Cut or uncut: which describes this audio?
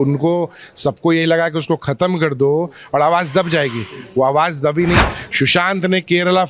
cut